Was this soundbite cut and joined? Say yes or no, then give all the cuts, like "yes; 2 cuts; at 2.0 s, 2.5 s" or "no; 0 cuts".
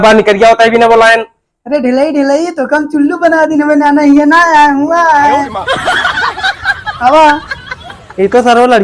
no; 0 cuts